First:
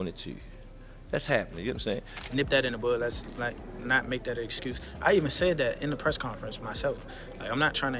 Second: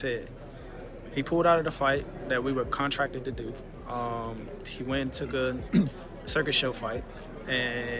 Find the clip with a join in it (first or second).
first